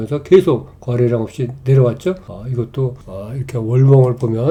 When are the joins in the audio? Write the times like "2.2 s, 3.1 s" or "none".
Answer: none